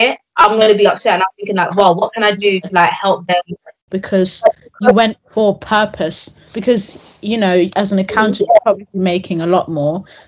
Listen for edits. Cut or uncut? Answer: cut